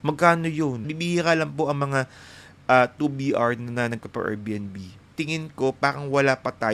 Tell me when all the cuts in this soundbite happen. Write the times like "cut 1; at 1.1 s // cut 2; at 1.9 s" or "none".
cut 1; at 0.9 s // cut 2; at 5.0 s